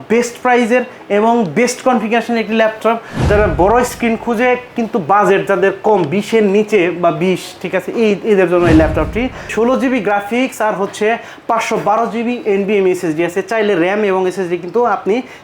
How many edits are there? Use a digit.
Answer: 2